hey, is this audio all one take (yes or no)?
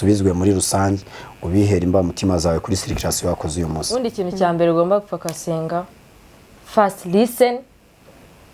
no